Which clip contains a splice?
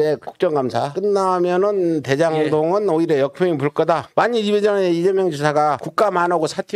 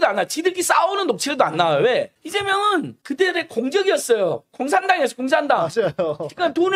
first; 2 cuts; at 4.1 s, 5.9 s

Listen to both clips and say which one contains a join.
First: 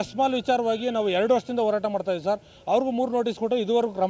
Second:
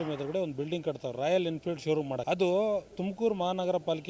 second; 1 cut; at 2.2 s

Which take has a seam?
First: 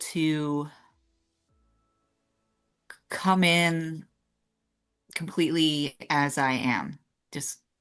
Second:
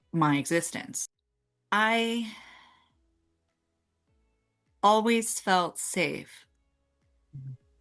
second; 1 cut; at 1.0 s

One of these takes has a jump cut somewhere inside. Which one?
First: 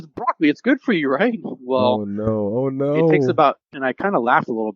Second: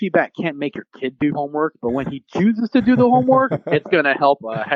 first; 1 cut; at 3.7 s

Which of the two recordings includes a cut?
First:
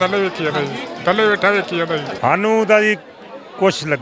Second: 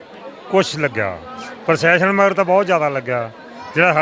first; 1 cut; at 2.1 s

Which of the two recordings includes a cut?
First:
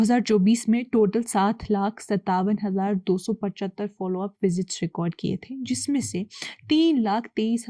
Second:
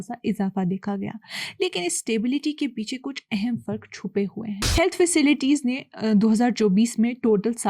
second; 1 cut; at 4.6 s

